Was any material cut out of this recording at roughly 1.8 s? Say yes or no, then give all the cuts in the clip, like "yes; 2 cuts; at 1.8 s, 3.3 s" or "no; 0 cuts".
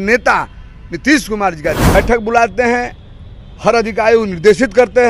yes; 1 cut; at 1.8 s